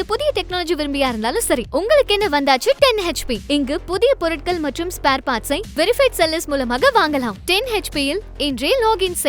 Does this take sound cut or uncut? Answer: uncut